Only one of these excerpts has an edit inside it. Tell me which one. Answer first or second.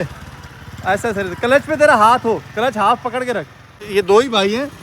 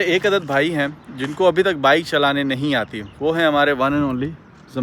first